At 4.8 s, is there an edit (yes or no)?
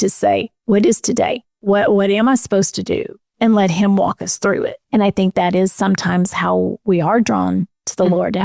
yes